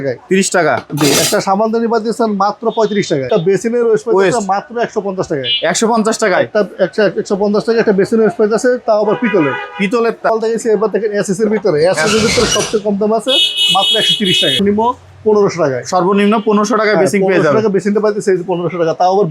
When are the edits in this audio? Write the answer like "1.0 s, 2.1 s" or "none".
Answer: 3.3 s, 10.3 s, 14.6 s